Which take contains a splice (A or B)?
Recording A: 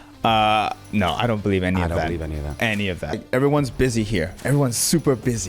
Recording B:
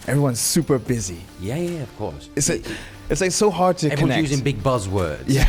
A